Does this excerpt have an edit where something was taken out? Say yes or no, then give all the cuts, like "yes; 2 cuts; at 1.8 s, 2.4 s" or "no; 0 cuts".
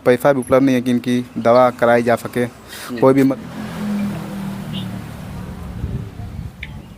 yes; 1 cut; at 3.3 s